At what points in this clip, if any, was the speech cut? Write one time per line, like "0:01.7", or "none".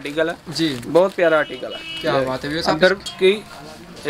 0:03.1